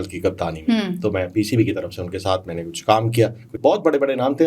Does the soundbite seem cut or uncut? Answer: cut